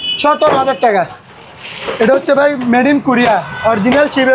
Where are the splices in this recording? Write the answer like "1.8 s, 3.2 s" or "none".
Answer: 1.2 s